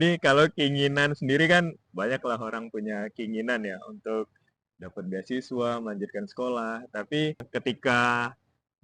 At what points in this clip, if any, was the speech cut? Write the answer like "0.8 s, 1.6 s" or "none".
7.4 s